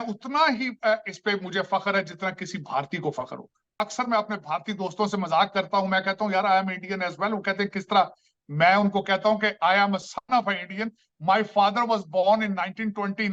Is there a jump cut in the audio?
yes; 1 cut; at 3.7 s

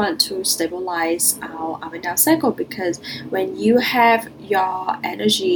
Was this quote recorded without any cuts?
yes; 0 cuts

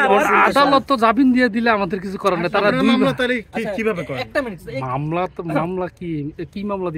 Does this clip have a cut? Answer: no; 0 cuts

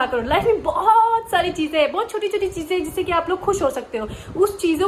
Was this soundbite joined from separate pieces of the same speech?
no; 0 cuts

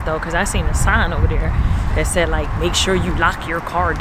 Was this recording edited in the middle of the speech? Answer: no; 0 cuts

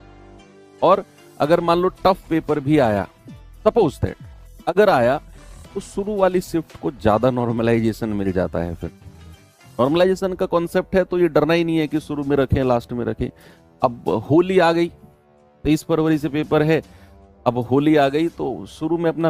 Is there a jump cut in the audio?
no; 0 cuts

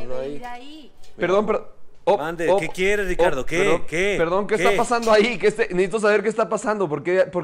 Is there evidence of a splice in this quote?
no; 0 cuts

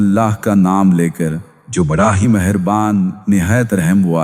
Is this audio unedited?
yes; 0 cuts

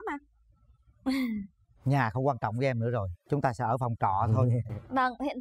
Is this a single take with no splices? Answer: yes; 0 cuts

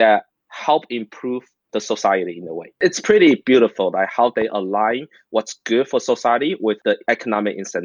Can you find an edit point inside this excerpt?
yes; 1 cut; at 6.9 s

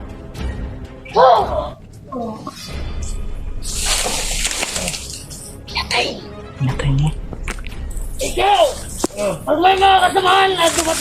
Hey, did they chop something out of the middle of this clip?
yes; 1 cut; at 1.0 s

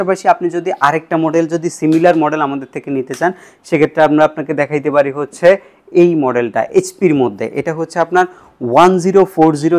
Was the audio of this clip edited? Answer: no; 0 cuts

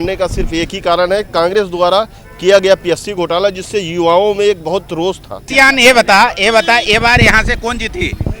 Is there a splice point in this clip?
yes; 1 cut; at 5.4 s

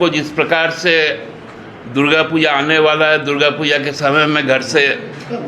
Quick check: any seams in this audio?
no; 0 cuts

